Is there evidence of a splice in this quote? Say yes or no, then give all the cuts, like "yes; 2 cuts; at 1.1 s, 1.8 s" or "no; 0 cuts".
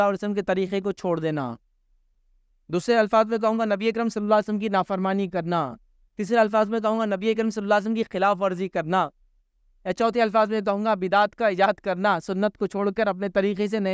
no; 0 cuts